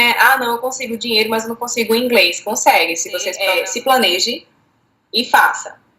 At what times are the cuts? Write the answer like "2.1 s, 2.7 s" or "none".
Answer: 3.3 s